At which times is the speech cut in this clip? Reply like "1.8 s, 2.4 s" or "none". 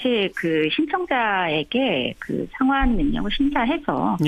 none